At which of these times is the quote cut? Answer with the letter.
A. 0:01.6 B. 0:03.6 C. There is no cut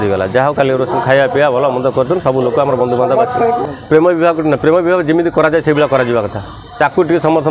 B